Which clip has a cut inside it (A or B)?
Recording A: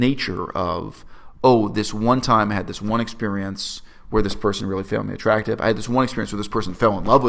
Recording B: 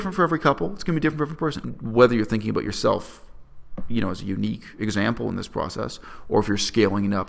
B